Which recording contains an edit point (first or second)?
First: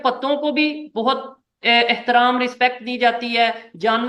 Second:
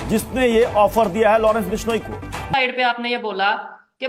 second